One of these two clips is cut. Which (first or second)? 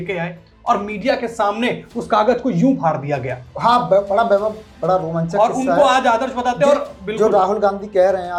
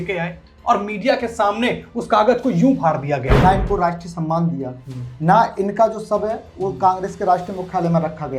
second